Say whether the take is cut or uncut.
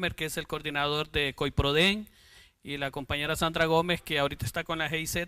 cut